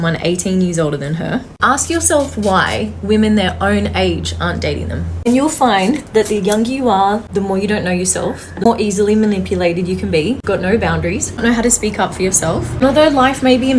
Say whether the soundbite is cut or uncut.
uncut